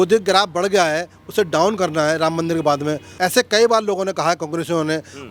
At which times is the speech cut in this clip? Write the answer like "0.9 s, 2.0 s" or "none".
3.1 s